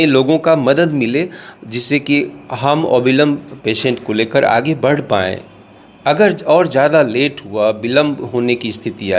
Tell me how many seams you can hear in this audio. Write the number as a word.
zero